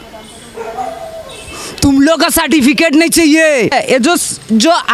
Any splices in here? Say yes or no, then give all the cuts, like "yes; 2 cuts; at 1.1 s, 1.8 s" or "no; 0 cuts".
yes; 1 cut; at 3.7 s